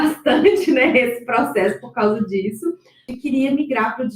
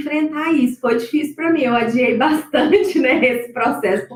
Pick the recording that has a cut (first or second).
first